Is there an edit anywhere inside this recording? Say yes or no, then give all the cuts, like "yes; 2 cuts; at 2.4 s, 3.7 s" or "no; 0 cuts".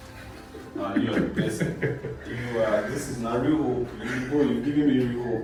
no; 0 cuts